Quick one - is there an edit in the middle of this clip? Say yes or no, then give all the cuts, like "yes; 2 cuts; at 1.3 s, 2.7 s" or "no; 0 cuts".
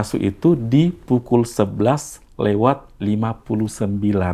no; 0 cuts